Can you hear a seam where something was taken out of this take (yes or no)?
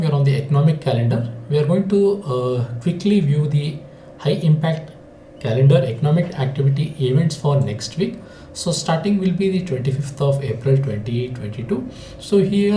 no